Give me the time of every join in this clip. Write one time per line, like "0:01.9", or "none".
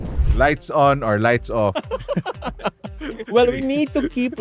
none